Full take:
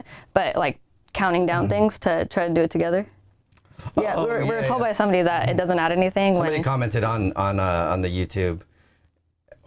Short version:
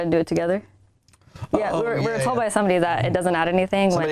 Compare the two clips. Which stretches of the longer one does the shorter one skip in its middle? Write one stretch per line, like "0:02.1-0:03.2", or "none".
none